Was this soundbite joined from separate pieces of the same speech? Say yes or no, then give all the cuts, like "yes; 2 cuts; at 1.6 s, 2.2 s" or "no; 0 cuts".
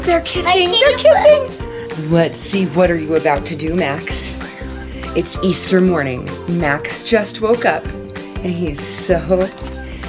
yes; 1 cut; at 1.9 s